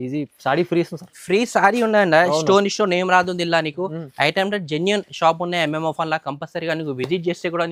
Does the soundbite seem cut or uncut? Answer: uncut